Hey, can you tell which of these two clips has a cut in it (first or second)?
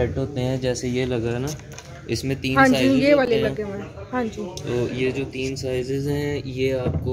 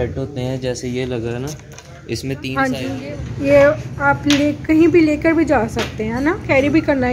second